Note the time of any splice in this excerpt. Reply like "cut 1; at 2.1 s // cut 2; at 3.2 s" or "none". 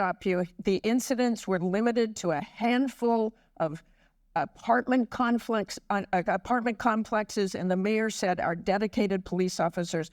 cut 1; at 1.7 s